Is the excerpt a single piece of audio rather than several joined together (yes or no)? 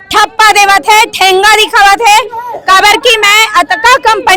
yes